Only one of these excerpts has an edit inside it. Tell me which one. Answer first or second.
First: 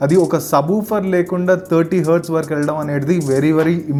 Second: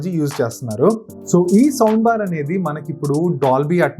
second